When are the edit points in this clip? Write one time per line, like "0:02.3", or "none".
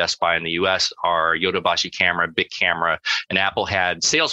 none